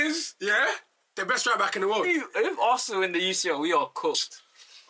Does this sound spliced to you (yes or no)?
yes